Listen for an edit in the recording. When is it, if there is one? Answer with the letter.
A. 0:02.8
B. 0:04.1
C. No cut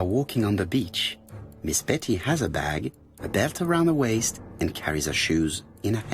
B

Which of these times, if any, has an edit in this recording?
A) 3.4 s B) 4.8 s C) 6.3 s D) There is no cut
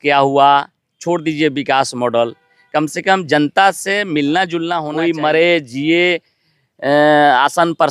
B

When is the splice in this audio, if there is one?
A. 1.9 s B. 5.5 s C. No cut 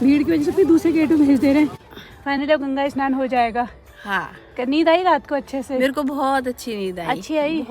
A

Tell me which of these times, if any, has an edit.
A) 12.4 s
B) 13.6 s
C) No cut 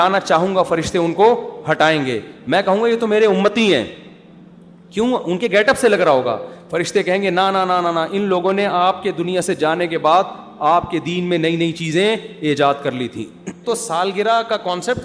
B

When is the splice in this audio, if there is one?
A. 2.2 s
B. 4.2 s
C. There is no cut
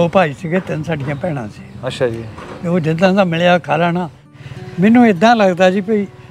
B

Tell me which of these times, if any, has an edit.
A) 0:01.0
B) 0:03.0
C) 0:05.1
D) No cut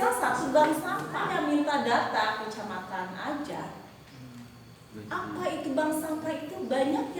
A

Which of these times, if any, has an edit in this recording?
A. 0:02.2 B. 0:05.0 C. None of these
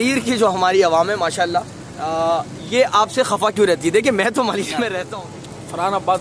B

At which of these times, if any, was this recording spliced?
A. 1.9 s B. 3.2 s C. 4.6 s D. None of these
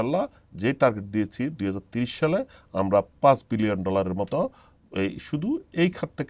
D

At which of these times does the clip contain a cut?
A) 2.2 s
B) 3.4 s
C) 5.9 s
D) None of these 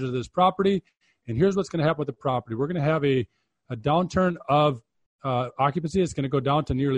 D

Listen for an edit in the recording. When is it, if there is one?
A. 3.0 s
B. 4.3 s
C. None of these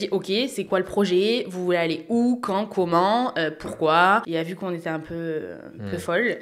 B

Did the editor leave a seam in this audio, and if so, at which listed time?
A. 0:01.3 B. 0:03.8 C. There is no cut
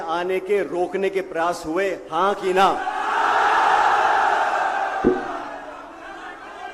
C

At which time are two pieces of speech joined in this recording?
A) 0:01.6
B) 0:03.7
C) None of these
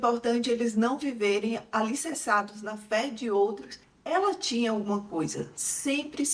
B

